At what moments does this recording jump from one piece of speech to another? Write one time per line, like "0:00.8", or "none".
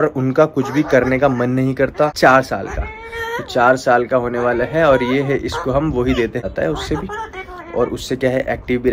0:02.1
0:06.4